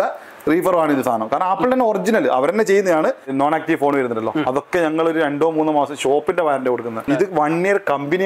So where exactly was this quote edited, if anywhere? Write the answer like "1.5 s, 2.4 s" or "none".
3.3 s, 7.0 s